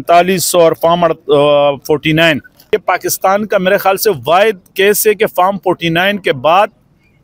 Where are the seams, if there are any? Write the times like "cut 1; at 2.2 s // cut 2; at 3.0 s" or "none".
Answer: cut 1; at 2.7 s